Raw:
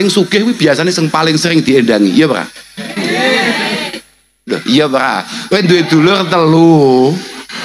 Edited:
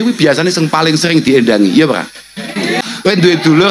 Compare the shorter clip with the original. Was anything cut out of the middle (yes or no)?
yes